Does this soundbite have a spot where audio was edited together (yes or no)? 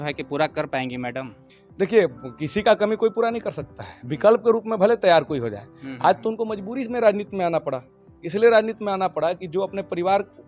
no